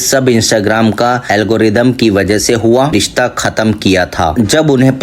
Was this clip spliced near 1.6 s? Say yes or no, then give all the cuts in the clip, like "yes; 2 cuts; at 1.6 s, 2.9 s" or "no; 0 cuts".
no; 1 cut; at 2.9 s